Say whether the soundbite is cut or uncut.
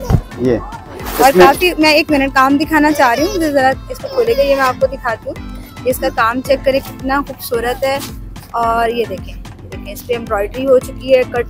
uncut